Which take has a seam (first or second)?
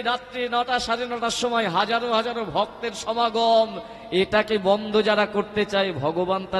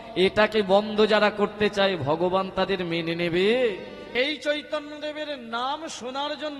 second